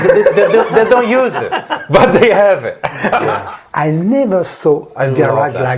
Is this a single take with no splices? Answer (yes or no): no